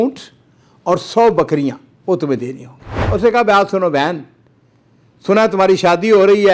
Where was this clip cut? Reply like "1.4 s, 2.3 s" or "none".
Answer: 3.0 s